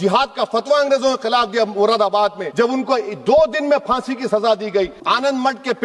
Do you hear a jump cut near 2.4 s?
yes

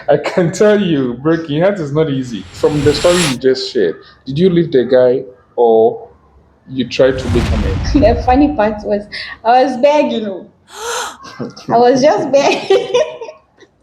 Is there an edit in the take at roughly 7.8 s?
yes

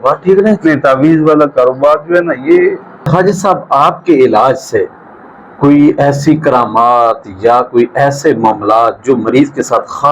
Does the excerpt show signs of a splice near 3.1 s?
yes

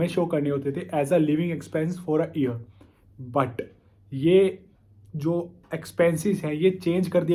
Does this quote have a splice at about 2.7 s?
no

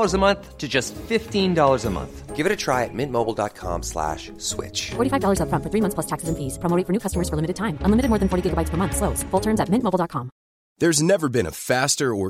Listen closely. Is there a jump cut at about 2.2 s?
no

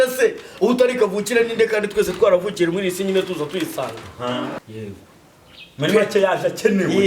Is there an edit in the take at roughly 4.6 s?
yes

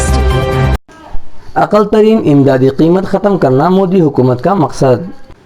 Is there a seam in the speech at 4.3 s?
no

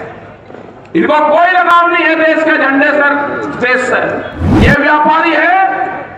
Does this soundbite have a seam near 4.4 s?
yes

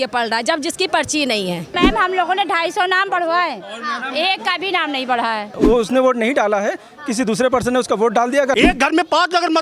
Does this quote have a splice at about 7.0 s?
no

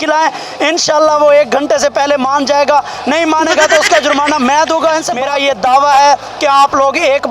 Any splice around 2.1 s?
no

